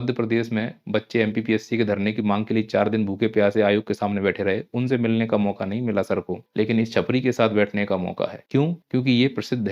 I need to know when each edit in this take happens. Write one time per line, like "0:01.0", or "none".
0:06.4
0:08.5